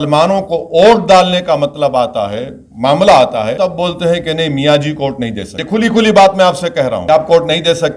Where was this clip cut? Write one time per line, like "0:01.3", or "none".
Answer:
0:03.5
0:05.5
0:07.0

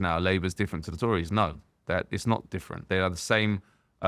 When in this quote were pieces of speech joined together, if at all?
0:02.7

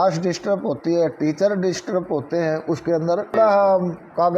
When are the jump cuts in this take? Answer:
0:03.3

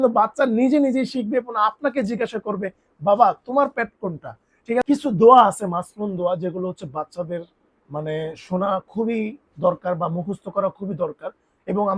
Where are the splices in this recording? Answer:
0:04.8

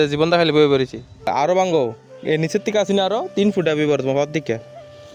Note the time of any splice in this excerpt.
0:01.3

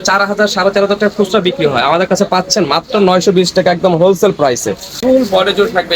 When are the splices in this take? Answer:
0:04.9

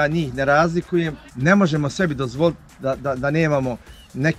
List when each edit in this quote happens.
0:01.2

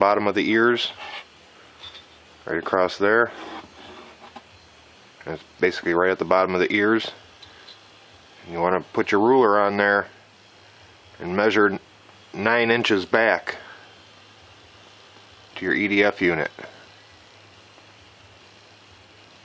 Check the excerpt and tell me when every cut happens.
0:02.8

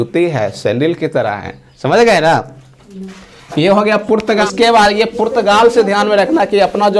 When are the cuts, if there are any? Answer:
0:04.4

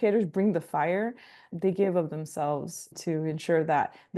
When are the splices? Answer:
0:01.5
0:02.9

